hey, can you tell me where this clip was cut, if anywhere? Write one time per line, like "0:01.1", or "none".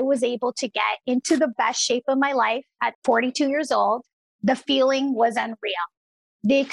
0:02.9